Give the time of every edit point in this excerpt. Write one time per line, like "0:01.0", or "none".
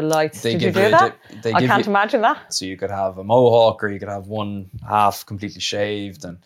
0:02.5